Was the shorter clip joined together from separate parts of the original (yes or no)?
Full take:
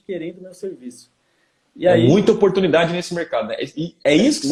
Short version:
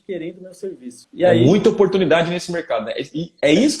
yes